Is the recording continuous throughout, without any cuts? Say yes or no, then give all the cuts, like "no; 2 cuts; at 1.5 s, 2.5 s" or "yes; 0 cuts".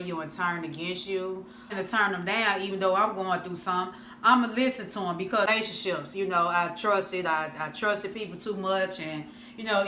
no; 2 cuts; at 1.7 s, 5.5 s